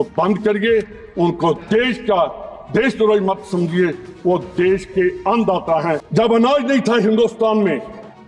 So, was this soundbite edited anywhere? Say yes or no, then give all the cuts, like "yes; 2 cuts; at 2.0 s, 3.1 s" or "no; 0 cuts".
yes; 1 cut; at 6.1 s